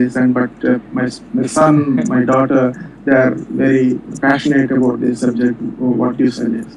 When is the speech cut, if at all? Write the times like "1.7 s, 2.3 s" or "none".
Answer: none